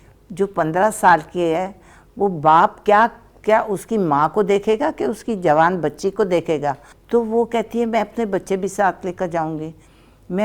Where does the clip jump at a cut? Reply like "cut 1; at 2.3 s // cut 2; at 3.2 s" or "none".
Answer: cut 1; at 6.9 s